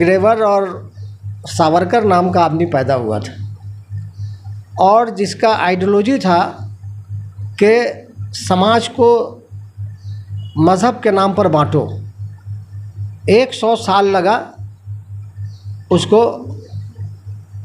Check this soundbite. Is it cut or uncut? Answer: uncut